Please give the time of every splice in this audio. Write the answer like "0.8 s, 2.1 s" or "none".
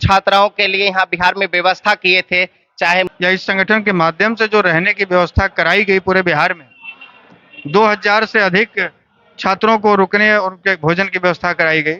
3.1 s

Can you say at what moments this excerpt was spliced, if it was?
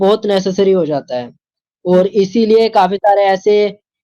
none

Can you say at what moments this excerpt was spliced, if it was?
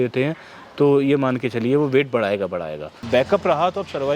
2.9 s

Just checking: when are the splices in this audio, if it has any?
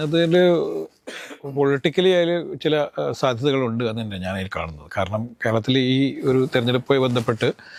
none

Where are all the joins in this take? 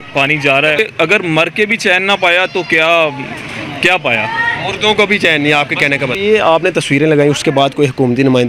0.8 s, 6.2 s

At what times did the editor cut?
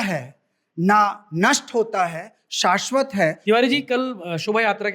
3.4 s

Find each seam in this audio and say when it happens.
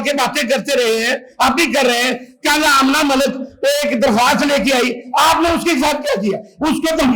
none

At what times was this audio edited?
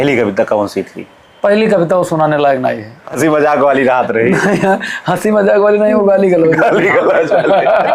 3.0 s

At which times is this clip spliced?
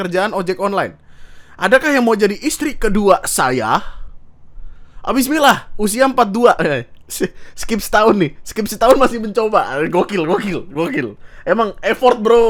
none

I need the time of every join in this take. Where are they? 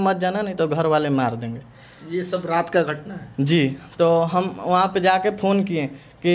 none

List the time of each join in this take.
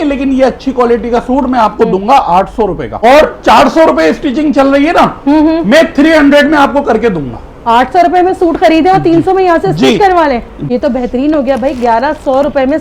2.9 s, 10.5 s

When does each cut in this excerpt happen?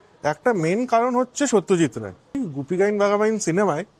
2.4 s

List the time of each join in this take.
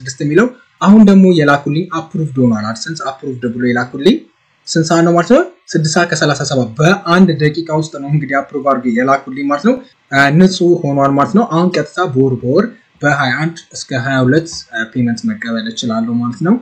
9.9 s

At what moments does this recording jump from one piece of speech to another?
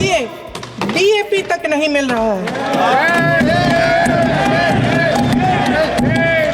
none

